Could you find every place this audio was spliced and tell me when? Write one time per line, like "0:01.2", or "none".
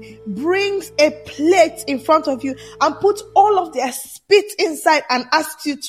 none